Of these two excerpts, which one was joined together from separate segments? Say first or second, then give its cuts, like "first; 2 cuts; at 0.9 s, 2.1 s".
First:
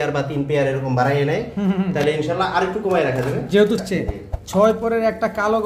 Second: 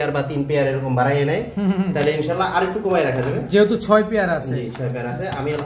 first; 1 cut; at 3.8 s